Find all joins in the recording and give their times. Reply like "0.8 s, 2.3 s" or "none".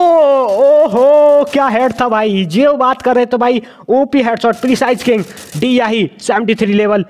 none